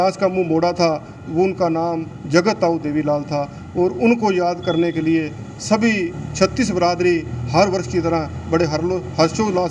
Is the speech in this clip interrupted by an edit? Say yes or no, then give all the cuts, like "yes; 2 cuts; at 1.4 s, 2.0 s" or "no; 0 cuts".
no; 0 cuts